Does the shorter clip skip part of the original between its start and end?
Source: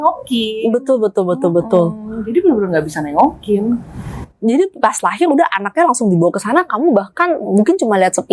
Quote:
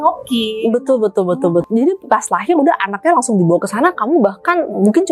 yes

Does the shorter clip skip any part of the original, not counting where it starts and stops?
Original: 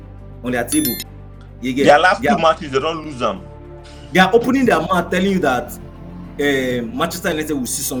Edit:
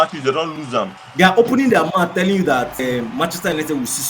yes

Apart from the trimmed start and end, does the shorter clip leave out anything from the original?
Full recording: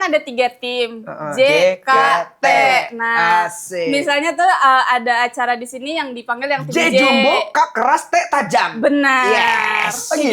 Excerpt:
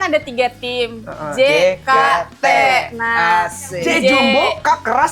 yes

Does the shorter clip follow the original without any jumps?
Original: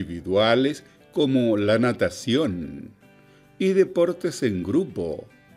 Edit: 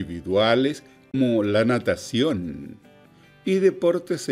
no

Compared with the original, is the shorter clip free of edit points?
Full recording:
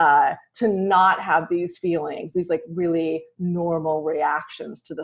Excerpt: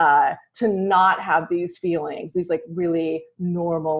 yes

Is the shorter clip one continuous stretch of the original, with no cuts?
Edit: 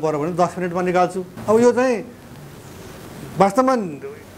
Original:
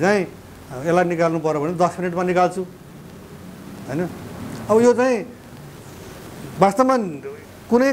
no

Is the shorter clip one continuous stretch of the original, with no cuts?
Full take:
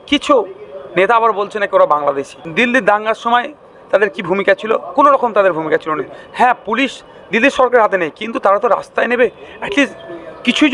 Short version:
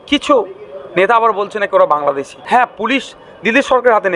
no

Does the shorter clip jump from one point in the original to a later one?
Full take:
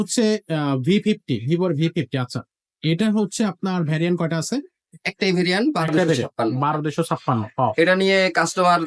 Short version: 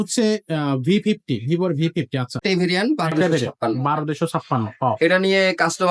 yes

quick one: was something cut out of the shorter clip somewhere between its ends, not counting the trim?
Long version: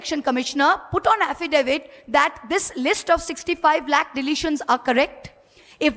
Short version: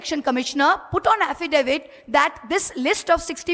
no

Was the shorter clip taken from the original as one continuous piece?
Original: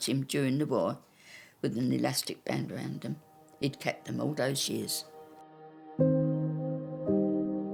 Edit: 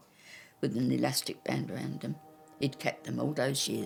yes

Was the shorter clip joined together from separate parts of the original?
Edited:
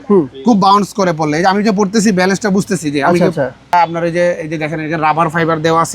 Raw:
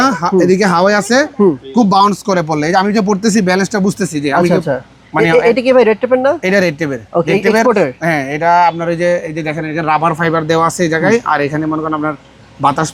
yes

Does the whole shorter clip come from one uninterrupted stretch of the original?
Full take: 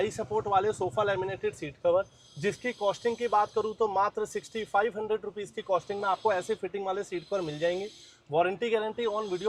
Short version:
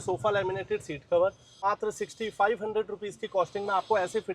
no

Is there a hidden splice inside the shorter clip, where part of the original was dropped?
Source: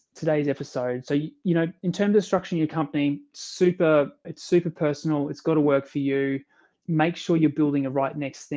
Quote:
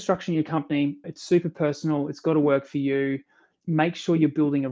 yes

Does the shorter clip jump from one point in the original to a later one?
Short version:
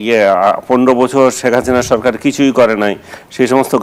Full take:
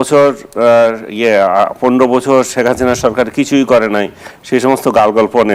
no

